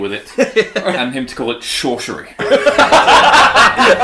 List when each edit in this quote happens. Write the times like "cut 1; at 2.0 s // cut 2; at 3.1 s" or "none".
none